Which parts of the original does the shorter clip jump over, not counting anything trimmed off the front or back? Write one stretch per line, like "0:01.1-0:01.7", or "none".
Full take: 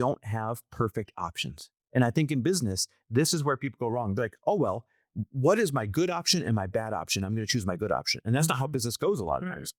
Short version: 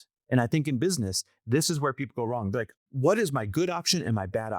0:04.4-0:05.1